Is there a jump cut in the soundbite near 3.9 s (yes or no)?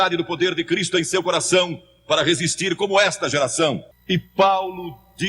yes